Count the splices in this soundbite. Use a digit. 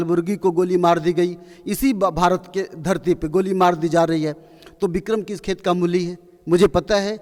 0